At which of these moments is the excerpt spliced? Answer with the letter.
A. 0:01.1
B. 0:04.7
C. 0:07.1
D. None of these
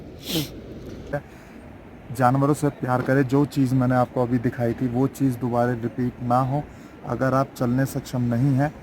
A